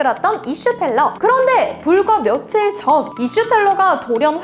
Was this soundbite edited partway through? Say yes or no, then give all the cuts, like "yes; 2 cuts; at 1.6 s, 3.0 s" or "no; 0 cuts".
yes; 1 cut; at 1.2 s